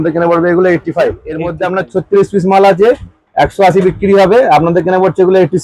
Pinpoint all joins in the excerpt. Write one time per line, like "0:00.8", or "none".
0:01.5